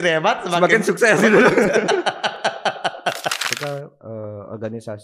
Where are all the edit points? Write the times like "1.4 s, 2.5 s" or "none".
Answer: 3.5 s